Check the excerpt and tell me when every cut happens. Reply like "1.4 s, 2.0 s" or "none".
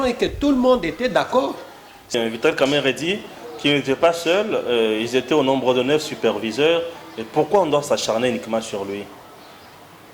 2.1 s